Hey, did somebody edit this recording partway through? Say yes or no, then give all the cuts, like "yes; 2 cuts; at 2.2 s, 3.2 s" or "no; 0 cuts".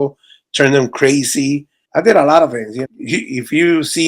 yes; 2 cuts; at 1.8 s, 2.8 s